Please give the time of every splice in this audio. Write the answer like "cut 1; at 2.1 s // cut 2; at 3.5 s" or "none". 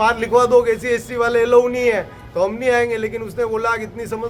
none